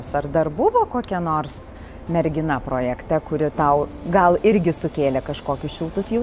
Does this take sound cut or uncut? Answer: uncut